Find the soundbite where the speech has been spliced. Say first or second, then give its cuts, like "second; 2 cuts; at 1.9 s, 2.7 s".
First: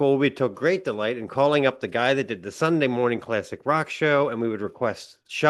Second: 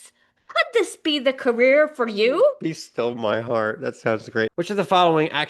second; 1 cut; at 4.5 s